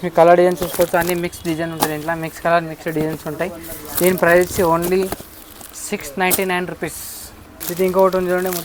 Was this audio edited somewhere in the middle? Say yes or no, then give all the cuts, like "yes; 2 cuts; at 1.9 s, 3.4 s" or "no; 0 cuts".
no; 0 cuts